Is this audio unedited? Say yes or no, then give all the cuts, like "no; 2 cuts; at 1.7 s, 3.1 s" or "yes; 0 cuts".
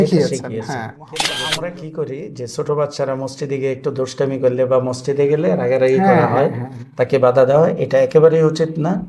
no; 1 cut; at 1.2 s